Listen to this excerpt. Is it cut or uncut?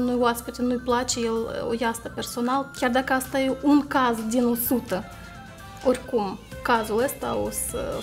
cut